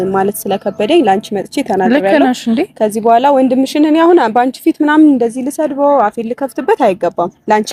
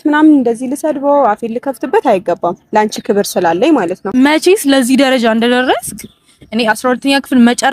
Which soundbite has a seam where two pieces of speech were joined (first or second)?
second